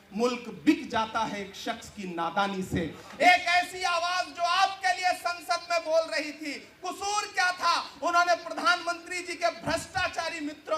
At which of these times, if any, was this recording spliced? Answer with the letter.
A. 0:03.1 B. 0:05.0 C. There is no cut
A